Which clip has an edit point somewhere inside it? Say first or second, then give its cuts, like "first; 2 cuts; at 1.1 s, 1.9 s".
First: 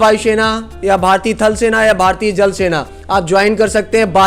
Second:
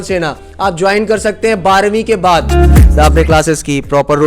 second; 1 cut; at 2.9 s